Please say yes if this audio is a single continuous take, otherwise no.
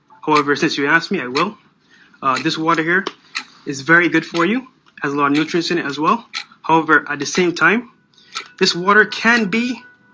yes